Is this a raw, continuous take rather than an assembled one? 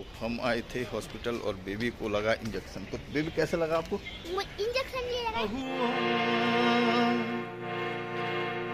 no; 1 cut; at 5.5 s

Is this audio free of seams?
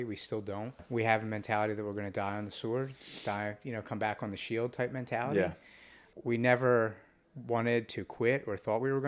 no; 2 cuts; at 0.8 s, 6.1 s

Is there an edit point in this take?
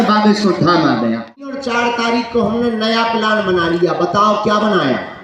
yes; 1 cut; at 1.6 s

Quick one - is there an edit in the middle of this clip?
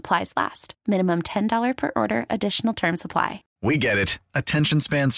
yes; 1 cut; at 3.4 s

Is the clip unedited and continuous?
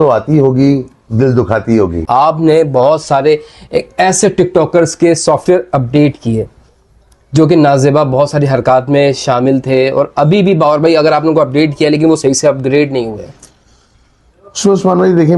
no; 1 cut; at 2.1 s

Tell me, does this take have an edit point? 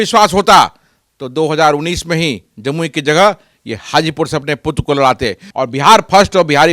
yes; 1 cut; at 5.4 s

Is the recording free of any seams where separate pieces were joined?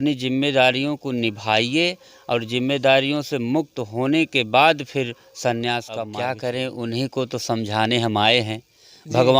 no; 1 cut; at 6.1 s

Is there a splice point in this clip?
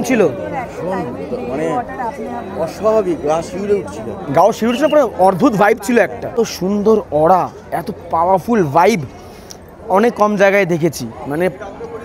yes; 1 cut; at 6.2 s

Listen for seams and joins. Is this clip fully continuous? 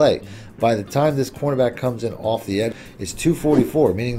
no; 1 cut; at 3.1 s

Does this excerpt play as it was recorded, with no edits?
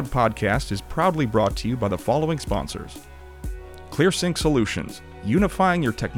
no; 1 cut; at 3.6 s

